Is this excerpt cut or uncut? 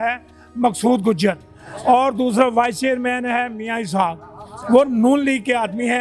uncut